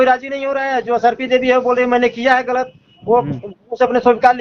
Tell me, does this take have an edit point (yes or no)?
no